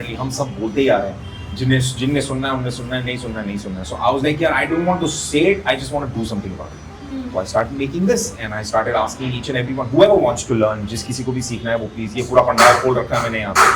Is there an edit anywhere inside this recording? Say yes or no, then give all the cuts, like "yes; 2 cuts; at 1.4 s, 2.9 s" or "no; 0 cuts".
no; 0 cuts